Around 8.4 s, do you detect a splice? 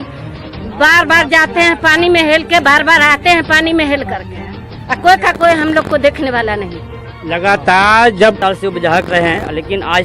yes; 1 cut; at 8.4 s

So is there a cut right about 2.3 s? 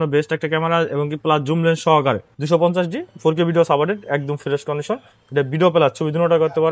yes; 1 cut; at 2.3 s

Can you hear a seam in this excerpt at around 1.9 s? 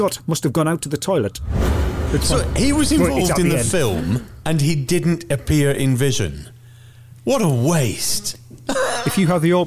yes; 1 cut; at 1.9 s

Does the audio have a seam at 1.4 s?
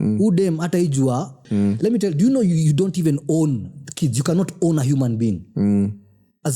yes; 1 cut; at 1.4 s

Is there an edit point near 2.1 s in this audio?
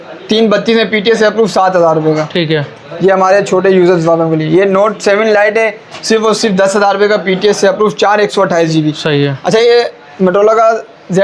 no; 0 cuts

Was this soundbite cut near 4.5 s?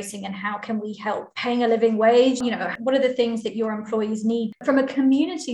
yes; 3 cuts; at 1.3 s, 2.7 s, 4.5 s

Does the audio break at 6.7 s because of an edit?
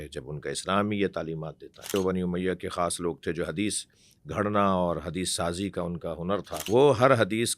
yes; 2 cuts; at 1.9 s, 6.7 s

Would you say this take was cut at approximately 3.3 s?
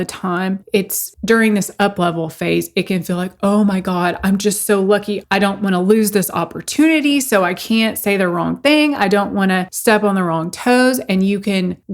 no; 2 cuts; at 1.1 s, 5.2 s

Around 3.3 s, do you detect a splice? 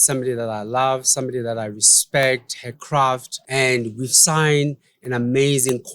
yes; 1 cut; at 3.3 s

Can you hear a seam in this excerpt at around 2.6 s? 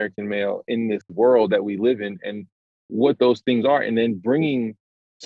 no; 1 cut; at 1.1 s

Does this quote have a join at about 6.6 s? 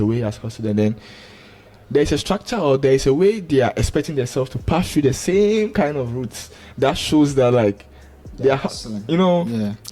no; 0 cuts

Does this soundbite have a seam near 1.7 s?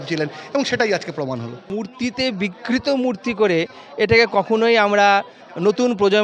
yes; 1 cut; at 1.7 s

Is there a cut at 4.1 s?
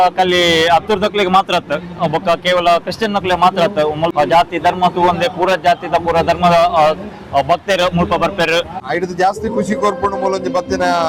yes; 2 cuts; at 4.1 s, 8.8 s

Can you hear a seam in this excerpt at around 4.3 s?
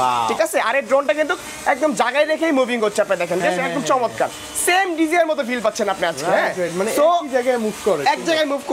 no; 0 cuts

